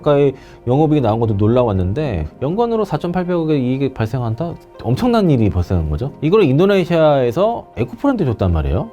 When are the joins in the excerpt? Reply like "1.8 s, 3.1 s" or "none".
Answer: 6.2 s